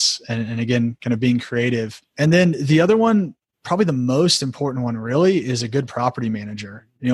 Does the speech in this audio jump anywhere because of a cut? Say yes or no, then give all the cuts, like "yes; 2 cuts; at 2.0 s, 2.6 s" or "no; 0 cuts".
no; 0 cuts